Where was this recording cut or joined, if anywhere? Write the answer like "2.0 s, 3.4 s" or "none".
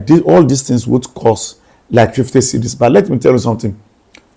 none